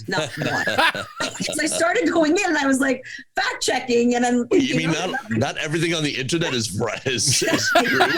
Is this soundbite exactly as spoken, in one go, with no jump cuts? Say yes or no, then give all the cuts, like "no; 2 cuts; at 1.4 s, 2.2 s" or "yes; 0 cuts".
yes; 0 cuts